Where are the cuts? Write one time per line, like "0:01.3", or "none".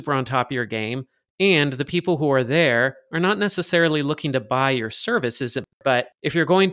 0:05.7